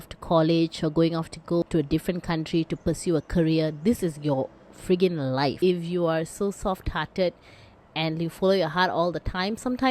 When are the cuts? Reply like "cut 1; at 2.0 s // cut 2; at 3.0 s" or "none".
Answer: cut 1; at 1.6 s // cut 2; at 5.6 s